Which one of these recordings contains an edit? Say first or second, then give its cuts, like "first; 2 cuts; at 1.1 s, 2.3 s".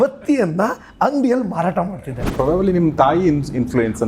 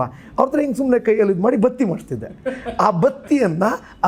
first; 1 cut; at 2.3 s